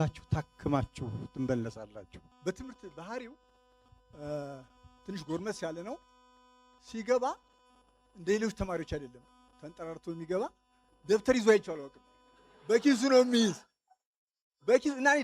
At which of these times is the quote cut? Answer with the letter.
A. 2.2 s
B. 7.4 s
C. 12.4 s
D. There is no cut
A